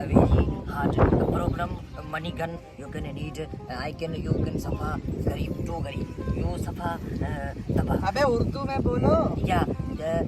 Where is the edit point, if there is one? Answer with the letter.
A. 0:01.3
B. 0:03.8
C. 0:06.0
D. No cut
D